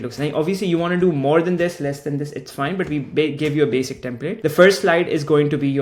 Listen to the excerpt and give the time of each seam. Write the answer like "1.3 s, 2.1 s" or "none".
none